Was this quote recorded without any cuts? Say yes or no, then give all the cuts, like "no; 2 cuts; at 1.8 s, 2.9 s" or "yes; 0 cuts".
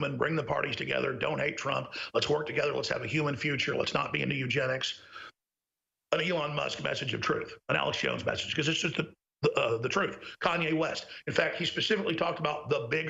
yes; 0 cuts